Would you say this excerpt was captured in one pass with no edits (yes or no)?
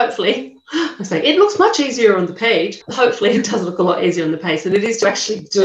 yes